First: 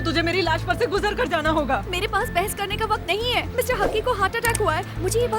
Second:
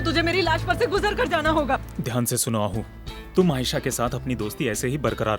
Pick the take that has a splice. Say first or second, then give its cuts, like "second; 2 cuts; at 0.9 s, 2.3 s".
second; 1 cut; at 1.9 s